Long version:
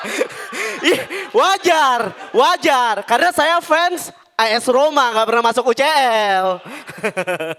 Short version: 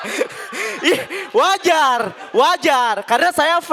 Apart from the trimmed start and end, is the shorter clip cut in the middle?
no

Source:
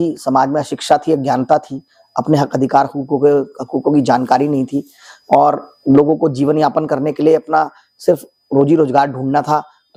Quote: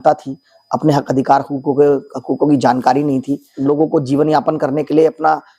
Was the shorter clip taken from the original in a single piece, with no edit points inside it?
no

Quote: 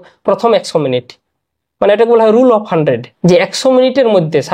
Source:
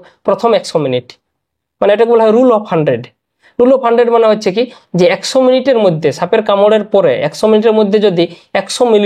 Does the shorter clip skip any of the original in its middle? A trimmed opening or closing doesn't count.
yes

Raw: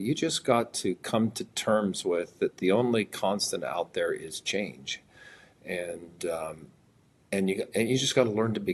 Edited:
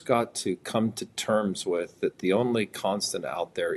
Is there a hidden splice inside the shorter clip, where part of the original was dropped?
no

